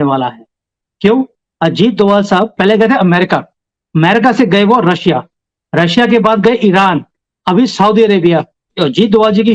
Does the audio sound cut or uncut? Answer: cut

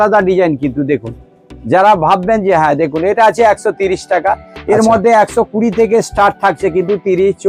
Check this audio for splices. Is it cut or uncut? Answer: uncut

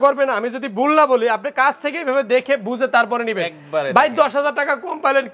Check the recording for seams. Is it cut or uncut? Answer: uncut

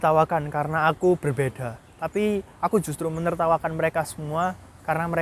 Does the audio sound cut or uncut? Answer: uncut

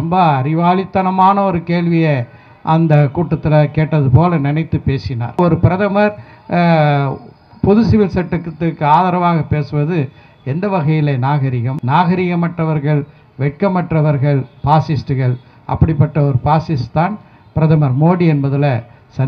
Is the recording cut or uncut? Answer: cut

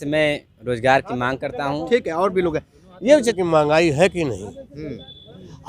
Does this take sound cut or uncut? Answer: cut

